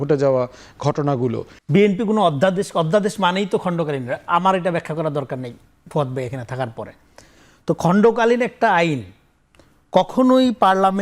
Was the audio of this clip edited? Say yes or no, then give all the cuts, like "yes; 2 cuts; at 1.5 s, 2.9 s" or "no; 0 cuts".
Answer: yes; 1 cut; at 1.5 s